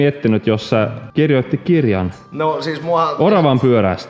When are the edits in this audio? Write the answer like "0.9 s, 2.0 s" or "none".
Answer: 1.0 s, 2.2 s